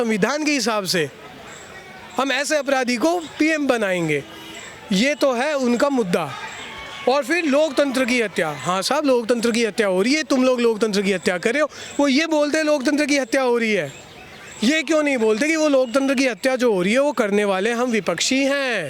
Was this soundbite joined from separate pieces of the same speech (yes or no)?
no